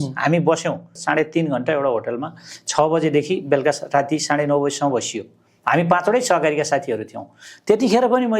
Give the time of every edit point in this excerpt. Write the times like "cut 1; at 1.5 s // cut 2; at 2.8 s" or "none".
cut 1; at 0.9 s

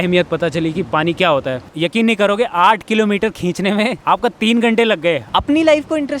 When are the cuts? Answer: cut 1; at 1.7 s // cut 2; at 4.0 s // cut 3; at 5.2 s

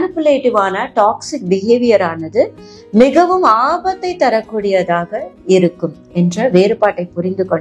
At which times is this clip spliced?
none

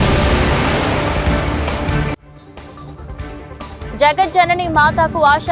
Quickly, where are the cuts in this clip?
cut 1; at 3.9 s

